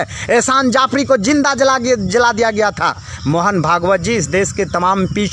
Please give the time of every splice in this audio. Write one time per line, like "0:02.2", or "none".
0:03.1